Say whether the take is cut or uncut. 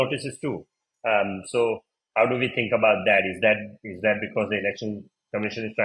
uncut